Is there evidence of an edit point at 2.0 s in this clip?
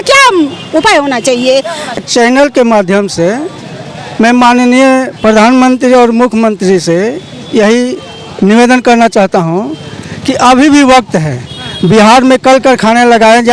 yes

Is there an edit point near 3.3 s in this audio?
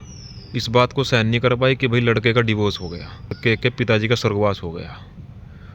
yes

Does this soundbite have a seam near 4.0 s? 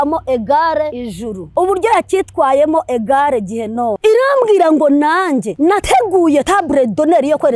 yes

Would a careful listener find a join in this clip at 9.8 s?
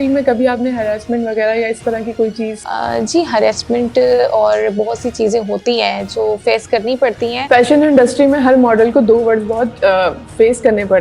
no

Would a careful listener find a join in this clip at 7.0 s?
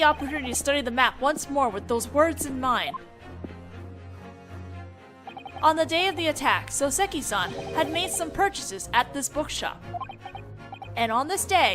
no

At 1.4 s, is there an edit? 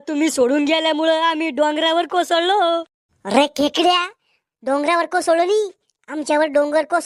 no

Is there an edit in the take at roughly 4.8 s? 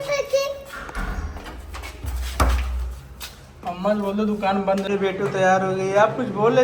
yes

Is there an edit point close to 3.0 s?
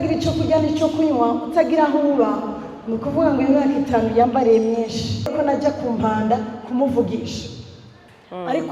no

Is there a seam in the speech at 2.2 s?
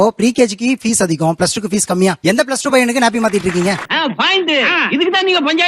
yes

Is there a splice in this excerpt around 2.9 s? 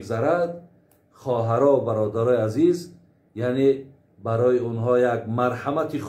no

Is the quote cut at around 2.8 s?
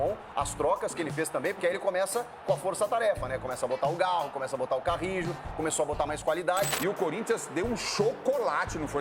no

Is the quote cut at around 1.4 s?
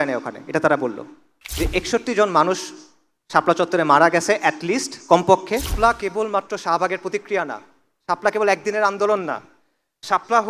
yes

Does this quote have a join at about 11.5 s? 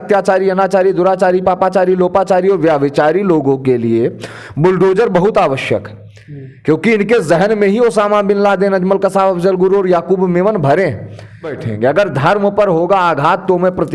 yes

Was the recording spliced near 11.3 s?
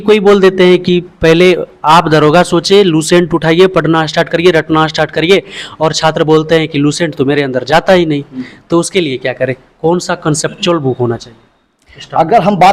no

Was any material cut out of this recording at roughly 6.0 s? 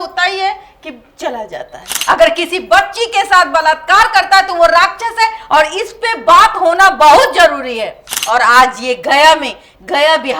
no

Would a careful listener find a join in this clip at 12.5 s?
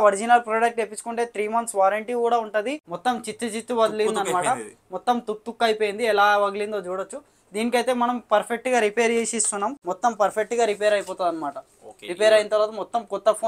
no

